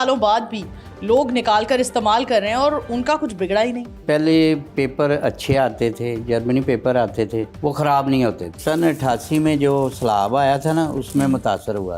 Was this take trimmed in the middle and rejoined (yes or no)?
yes